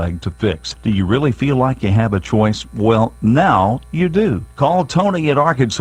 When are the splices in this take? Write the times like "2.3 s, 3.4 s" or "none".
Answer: none